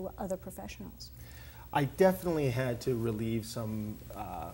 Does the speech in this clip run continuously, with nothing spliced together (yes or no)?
yes